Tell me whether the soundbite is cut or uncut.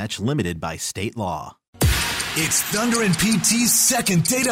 cut